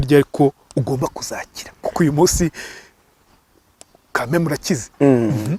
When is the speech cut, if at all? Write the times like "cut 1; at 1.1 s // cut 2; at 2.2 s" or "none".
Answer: none